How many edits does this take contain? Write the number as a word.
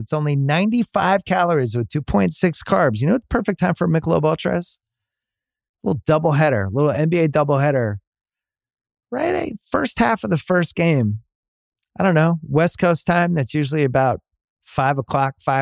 zero